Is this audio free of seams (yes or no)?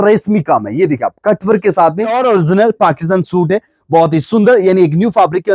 no